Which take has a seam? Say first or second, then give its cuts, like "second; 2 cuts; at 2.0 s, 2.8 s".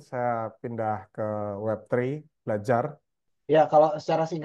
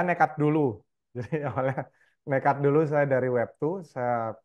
first; 1 cut; at 3.3 s